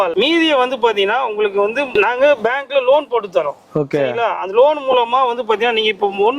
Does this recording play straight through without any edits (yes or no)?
yes